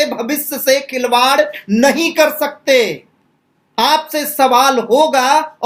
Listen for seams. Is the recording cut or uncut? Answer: uncut